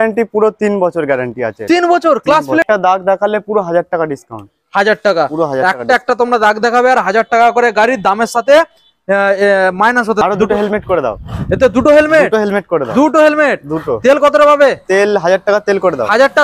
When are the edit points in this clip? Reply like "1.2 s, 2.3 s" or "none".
2.6 s, 10.2 s